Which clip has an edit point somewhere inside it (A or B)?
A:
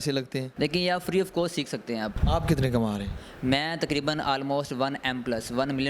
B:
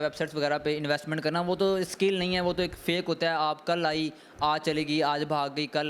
A